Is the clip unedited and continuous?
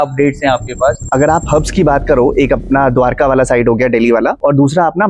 no; 1 cut; at 1.0 s

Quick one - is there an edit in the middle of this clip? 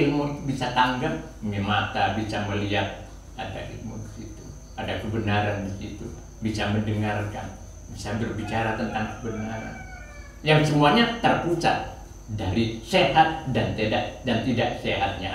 no; 0 cuts

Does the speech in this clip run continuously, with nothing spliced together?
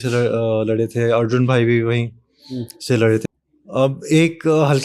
no; 1 cut; at 3.2 s

